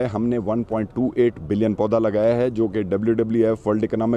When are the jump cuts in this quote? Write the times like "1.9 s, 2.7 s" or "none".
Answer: none